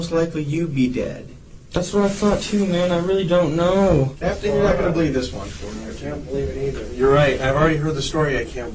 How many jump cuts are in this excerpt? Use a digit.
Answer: 1